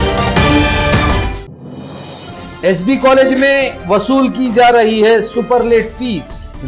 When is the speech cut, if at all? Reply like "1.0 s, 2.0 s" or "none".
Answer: 2.4 s